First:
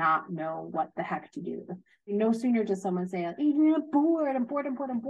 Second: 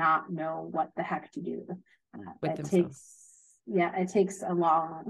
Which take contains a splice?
first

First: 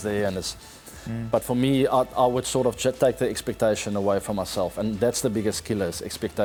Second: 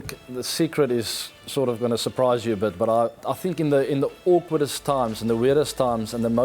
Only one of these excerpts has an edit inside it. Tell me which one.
second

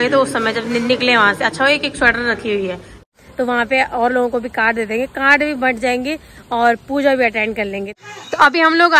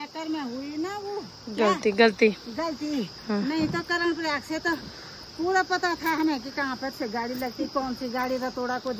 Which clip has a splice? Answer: first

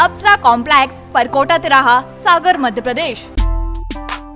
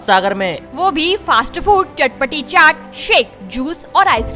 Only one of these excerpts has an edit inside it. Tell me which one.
first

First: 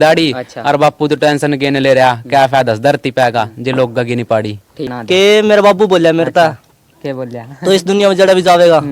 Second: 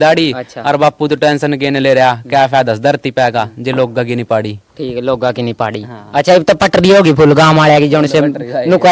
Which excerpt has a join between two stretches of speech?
first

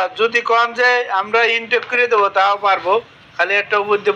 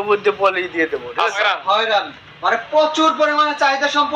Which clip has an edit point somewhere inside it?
second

